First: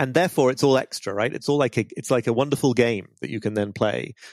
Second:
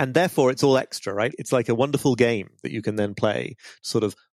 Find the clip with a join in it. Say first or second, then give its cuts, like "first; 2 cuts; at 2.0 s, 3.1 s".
second; 1 cut; at 1.4 s